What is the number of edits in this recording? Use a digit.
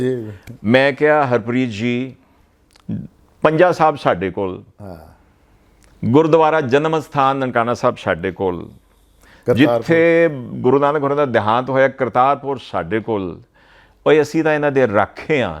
0